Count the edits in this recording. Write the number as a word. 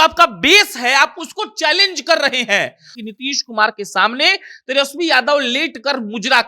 one